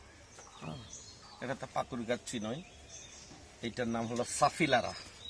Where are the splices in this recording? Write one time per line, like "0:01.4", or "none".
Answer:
none